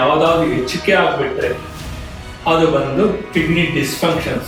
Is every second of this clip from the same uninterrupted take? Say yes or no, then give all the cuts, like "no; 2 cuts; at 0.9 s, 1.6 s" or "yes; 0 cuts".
yes; 0 cuts